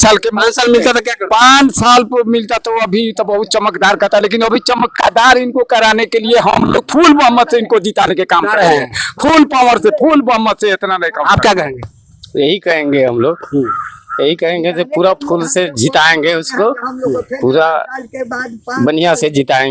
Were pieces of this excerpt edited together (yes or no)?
no